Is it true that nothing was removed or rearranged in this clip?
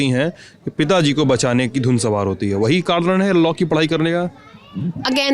yes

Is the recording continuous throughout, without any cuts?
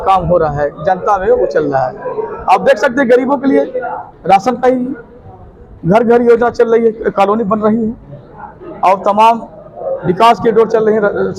yes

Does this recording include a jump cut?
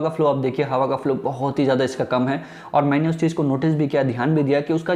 no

